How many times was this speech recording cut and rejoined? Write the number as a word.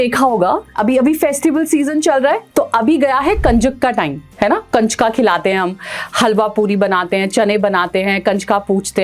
two